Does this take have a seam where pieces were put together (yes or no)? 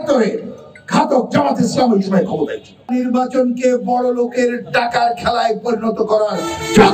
yes